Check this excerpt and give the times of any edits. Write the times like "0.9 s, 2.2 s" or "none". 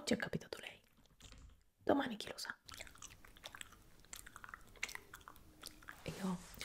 2.7 s